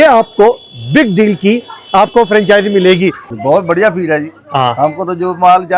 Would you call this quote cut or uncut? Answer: cut